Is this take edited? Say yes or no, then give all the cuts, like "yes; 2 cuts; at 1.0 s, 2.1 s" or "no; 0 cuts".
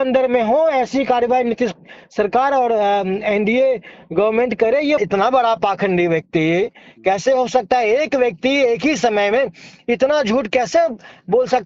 yes; 1 cut; at 5.0 s